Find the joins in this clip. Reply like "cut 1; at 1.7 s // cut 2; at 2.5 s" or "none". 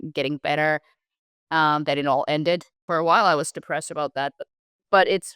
cut 1; at 2.8 s // cut 2; at 4.4 s